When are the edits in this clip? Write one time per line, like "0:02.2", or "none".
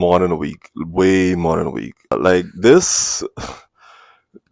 0:02.2